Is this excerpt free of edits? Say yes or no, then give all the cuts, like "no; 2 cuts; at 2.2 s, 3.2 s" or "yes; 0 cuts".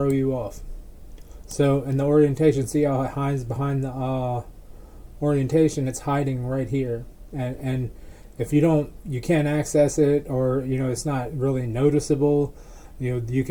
yes; 0 cuts